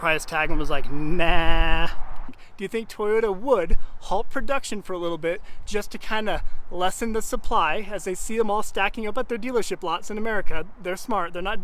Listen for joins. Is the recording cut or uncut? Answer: cut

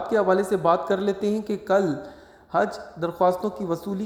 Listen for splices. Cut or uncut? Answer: uncut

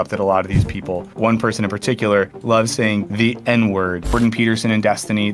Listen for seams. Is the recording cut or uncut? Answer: cut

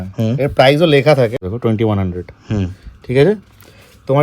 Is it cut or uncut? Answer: cut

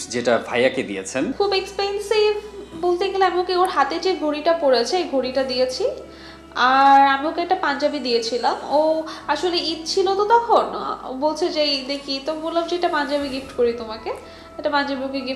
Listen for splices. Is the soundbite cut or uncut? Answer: uncut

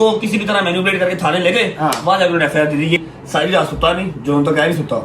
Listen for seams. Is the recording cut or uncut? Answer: cut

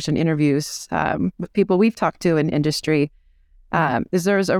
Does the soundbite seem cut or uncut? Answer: uncut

